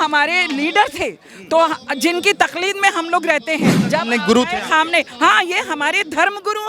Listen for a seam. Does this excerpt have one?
yes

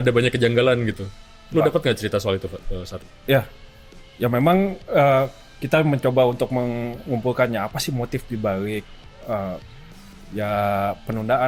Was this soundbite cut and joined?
no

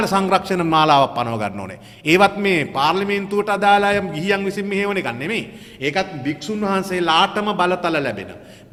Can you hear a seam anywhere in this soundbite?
no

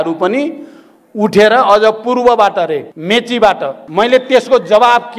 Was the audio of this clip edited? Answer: yes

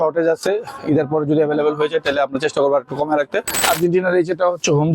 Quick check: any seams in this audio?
yes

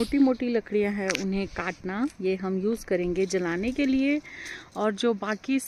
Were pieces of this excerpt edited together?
no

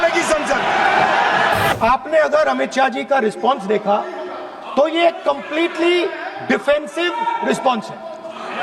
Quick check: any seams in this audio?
yes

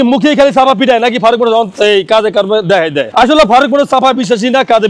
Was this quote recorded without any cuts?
yes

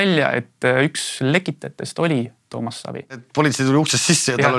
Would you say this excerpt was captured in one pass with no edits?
no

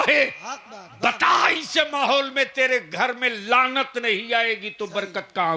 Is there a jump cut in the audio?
no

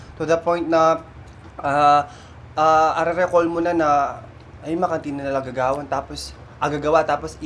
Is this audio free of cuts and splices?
yes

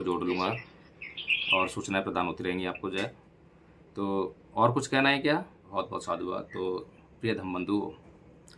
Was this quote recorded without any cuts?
no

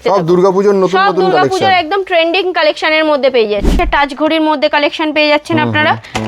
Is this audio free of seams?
no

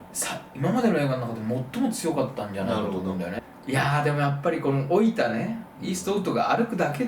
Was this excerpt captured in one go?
no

